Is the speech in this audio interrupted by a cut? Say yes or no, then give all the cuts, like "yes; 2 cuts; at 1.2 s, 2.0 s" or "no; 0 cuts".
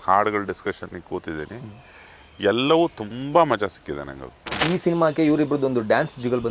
yes; 1 cut; at 4.6 s